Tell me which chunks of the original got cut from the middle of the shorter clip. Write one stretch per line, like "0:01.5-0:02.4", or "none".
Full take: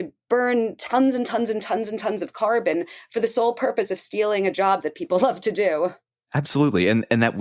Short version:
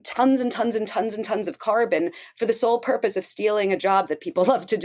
none